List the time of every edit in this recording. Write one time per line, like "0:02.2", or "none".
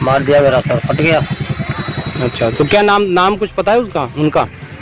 none